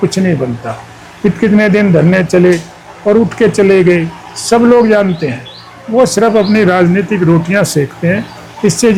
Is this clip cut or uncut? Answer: uncut